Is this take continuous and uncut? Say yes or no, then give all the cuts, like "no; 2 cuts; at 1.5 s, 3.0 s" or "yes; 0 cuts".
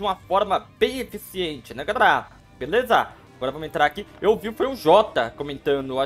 yes; 0 cuts